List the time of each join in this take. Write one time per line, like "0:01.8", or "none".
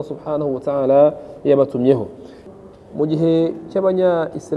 0:02.5